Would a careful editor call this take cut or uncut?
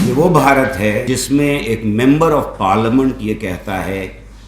cut